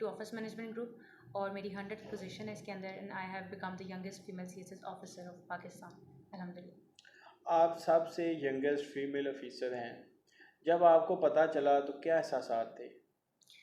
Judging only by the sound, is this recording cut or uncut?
uncut